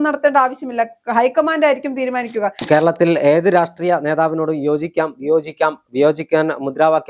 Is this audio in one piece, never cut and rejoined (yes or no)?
no